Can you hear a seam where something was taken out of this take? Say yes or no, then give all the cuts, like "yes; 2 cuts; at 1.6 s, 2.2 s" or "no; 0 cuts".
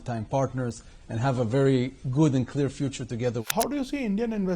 yes; 1 cut; at 3.4 s